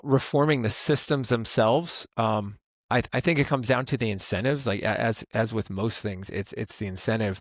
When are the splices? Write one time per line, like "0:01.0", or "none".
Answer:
none